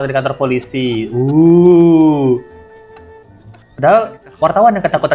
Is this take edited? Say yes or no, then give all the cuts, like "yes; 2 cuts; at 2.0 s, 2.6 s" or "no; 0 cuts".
no; 0 cuts